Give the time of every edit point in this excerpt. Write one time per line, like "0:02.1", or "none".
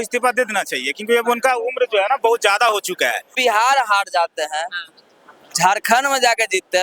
0:03.3

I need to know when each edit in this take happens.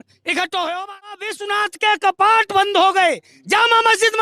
0:01.4

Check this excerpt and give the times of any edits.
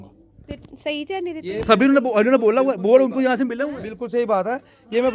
none

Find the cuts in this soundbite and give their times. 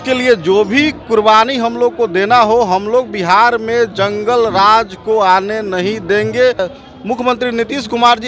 0:06.6

